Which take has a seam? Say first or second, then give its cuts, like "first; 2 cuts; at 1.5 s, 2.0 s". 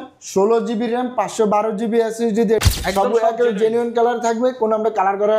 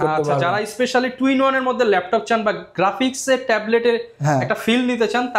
first; 1 cut; at 2.6 s